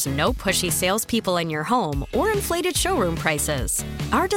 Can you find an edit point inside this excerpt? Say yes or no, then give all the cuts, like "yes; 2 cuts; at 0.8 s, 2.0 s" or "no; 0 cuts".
no; 0 cuts